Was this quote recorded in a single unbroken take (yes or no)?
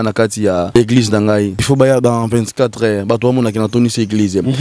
no